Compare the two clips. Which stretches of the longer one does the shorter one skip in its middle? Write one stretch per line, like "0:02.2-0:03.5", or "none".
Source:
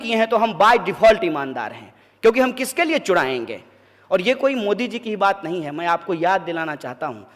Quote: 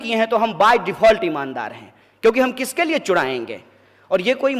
none